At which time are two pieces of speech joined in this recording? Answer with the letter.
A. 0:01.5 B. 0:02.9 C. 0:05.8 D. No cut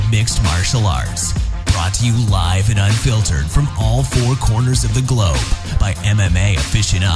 C